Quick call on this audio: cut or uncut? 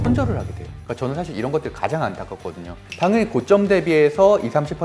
cut